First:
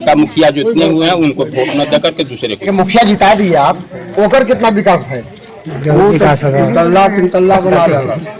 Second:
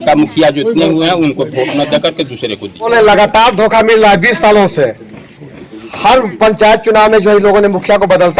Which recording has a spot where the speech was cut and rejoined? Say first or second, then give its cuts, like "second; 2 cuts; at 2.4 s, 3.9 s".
first; 1 cut; at 2.7 s